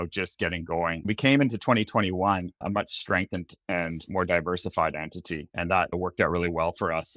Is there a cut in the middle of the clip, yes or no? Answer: yes